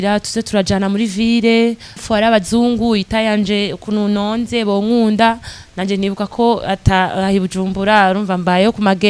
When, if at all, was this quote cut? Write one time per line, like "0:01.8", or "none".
0:02.0

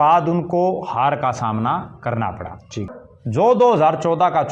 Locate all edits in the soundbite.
0:03.0

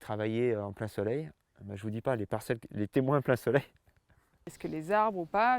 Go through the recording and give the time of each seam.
0:04.6

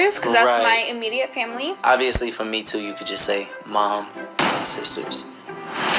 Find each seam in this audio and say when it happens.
none

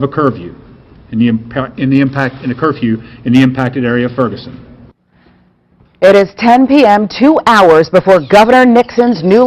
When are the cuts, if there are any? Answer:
0:07.3

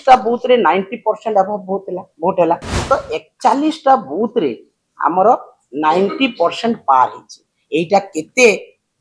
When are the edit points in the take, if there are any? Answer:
0:02.7

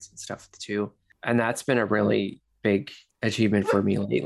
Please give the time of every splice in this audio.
0:01.1

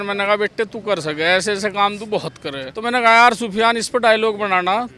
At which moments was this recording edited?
0:02.7

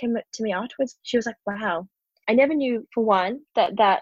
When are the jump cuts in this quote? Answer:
0:01.0
0:02.1

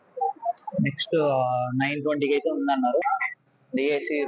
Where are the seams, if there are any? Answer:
0:03.0

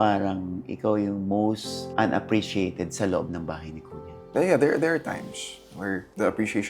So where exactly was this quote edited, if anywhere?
0:04.2

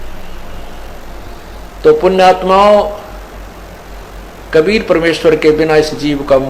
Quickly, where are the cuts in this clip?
0:01.3

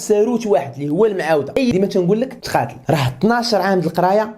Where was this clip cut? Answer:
0:01.7

